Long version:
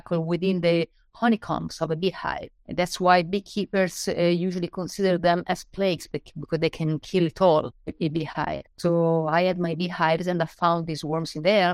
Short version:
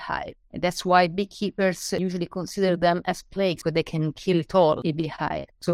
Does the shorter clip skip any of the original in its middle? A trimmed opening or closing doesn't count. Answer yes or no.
yes